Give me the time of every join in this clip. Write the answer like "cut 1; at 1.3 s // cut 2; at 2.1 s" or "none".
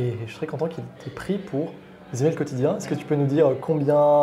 none